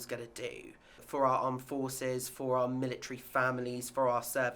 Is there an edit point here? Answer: yes; 1 cut; at 1.0 s

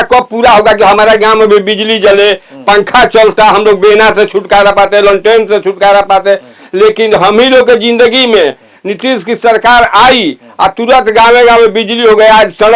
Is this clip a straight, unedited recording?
yes; 0 cuts

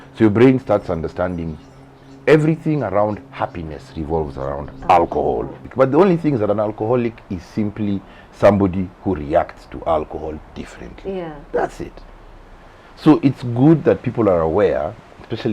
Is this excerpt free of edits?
no; 1 cut; at 5.6 s

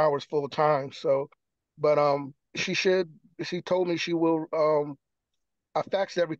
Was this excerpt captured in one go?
yes; 0 cuts

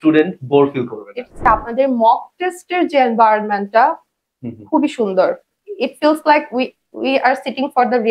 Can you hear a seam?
yes; 1 cut; at 1.4 s

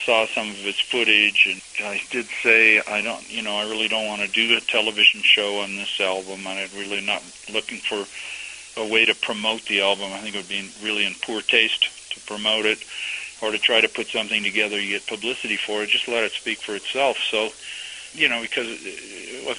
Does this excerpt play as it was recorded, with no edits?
no; 1 cut; at 1.4 s

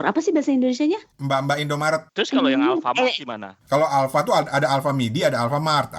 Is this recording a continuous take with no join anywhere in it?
no; 1 cut; at 2.1 s

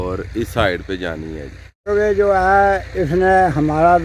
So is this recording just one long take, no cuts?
no; 1 cut; at 1.8 s

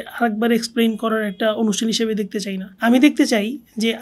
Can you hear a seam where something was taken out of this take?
yes; 1 cut; at 2.7 s

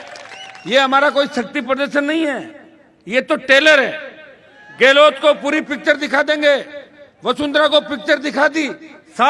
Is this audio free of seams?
yes; 0 cuts

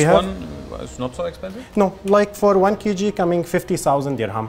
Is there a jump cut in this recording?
no; 0 cuts

